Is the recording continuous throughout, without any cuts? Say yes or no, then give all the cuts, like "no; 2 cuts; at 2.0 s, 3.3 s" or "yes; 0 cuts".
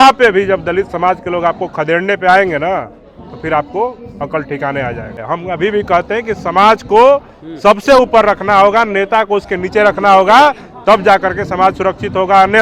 no; 1 cut; at 5.2 s